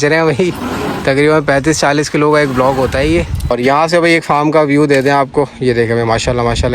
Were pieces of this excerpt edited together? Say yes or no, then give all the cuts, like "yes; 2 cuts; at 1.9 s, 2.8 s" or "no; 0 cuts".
yes; 1 cut; at 3.5 s